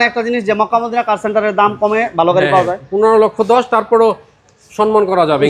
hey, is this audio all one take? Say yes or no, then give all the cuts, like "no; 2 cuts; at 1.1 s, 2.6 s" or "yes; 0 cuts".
yes; 0 cuts